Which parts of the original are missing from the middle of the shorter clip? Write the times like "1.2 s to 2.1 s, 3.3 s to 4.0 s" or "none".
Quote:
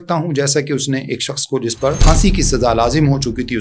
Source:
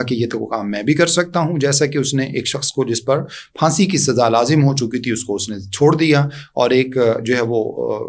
3.2 s to 3.5 s